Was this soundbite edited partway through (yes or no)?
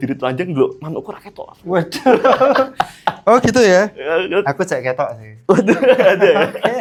no